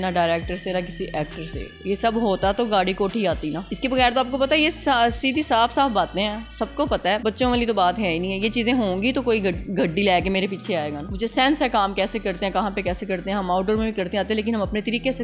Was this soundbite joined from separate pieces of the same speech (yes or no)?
yes